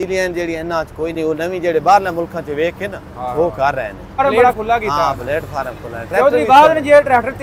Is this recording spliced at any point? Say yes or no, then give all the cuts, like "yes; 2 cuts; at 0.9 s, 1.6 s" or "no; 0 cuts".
yes; 1 cut; at 4.4 s